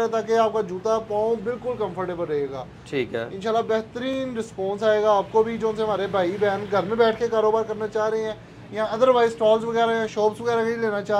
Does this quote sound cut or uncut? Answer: uncut